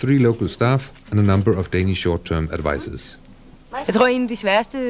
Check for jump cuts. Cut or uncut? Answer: cut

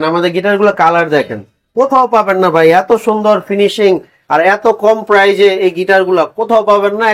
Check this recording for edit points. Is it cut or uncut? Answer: uncut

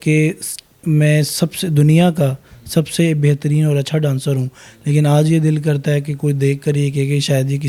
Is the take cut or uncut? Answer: uncut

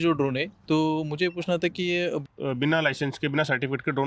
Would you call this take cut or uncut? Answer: cut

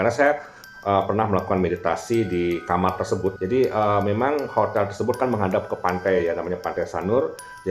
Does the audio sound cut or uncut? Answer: cut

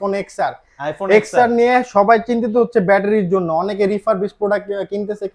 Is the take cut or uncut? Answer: uncut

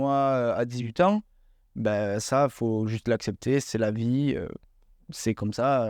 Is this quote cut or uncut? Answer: uncut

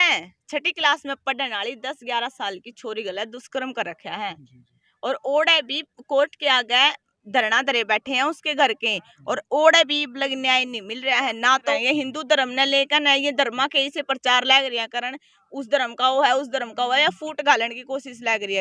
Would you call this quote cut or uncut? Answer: cut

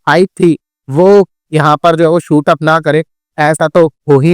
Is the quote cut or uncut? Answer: uncut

